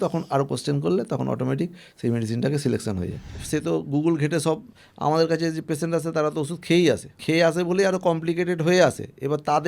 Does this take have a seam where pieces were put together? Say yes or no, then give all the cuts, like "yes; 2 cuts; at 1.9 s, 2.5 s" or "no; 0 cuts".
yes; 2 cuts; at 3.4 s, 7.2 s